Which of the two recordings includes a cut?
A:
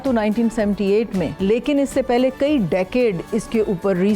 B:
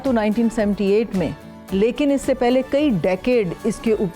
A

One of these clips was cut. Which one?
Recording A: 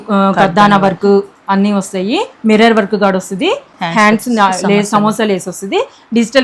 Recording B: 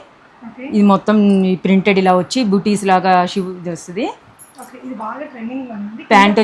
A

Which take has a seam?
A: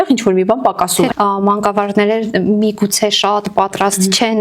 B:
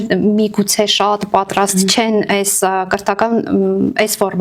A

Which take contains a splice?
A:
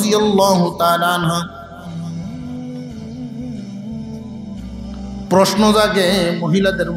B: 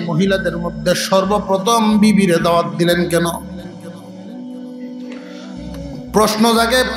A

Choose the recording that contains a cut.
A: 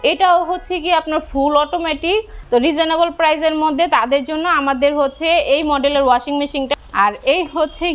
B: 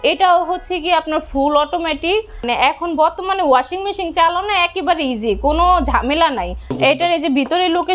A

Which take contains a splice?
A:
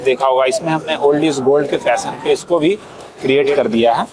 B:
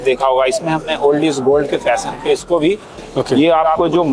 B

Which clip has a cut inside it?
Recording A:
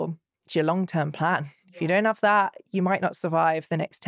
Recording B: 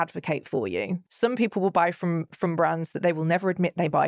B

